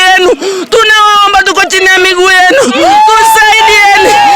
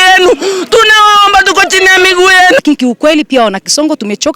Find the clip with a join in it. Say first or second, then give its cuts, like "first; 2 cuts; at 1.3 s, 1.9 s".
second; 1 cut; at 2.6 s